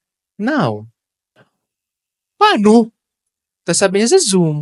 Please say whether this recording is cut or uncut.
uncut